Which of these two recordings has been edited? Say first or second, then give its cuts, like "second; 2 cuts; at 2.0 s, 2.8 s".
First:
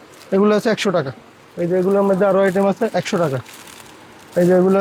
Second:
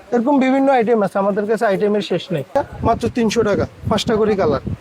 second; 1 cut; at 2.5 s